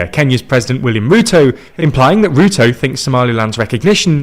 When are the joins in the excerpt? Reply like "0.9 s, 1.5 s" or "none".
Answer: 1.7 s